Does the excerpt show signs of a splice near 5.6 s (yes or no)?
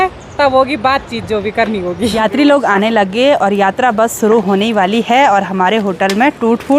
no